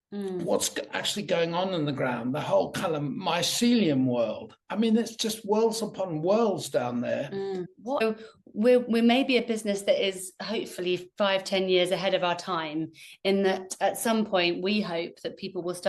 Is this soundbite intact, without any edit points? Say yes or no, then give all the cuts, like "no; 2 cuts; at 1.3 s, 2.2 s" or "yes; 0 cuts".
no; 1 cut; at 8.0 s